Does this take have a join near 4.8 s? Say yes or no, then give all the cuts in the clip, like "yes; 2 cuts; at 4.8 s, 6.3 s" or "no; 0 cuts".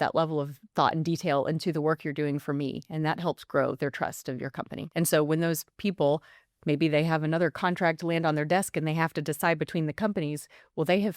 yes; 1 cut; at 4.8 s